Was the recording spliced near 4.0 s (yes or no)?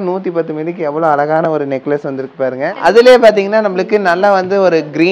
no